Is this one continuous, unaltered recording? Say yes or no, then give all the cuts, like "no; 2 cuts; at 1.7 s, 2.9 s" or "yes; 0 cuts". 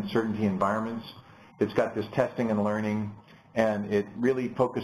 no; 1 cut; at 2.6 s